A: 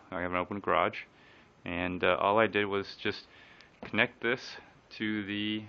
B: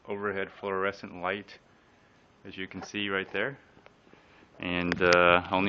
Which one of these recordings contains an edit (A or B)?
A